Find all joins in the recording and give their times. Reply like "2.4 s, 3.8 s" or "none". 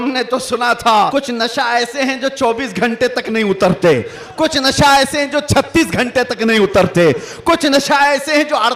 1.1 s